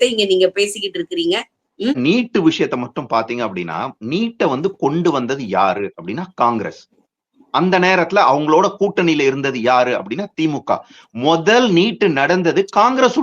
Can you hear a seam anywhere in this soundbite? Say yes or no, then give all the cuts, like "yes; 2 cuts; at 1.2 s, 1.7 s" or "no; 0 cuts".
yes; 1 cut; at 2.0 s